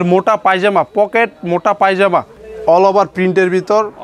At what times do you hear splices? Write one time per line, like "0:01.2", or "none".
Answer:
0:02.4